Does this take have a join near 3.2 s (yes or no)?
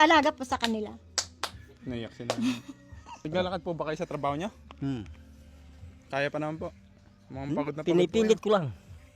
yes